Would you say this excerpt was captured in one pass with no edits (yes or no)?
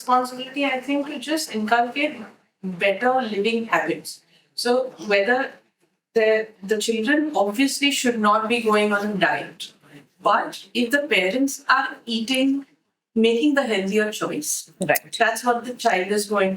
yes